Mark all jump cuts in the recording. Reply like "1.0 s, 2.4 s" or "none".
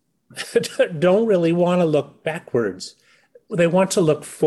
3.5 s